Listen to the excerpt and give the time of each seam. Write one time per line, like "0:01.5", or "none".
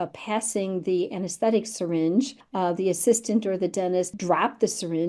0:02.4
0:04.1